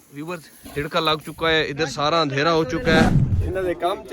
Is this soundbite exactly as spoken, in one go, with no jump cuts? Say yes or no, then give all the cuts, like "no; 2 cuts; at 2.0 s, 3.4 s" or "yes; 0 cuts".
no; 1 cut; at 3.1 s